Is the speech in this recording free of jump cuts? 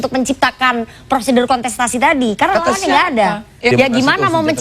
no; 1 cut; at 3.7 s

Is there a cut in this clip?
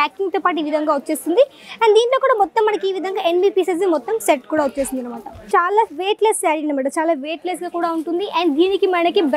yes; 1 cut; at 5.3 s

